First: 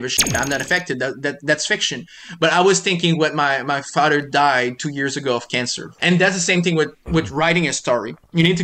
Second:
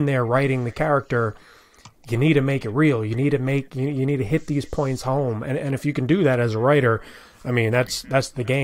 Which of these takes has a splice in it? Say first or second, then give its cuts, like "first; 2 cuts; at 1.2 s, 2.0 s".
first; 1 cut; at 5.8 s